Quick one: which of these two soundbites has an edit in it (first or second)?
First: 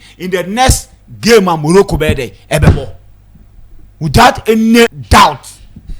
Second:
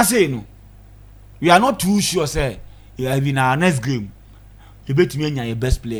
first